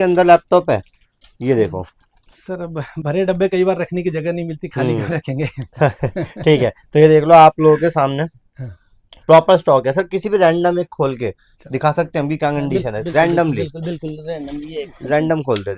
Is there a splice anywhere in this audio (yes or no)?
no